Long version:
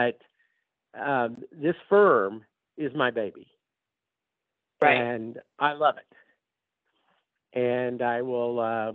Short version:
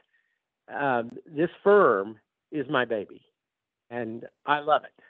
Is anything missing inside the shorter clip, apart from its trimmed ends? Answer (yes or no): yes